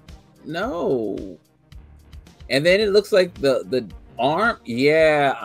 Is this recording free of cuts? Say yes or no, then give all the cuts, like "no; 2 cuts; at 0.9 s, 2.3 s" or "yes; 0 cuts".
yes; 0 cuts